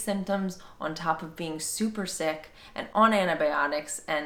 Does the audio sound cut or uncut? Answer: uncut